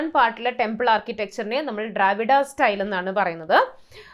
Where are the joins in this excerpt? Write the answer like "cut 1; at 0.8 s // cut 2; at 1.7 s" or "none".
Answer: none